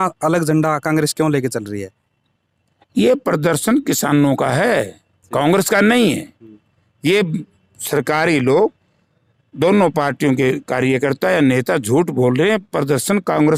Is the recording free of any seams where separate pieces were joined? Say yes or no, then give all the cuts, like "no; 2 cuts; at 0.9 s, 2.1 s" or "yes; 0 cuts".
yes; 0 cuts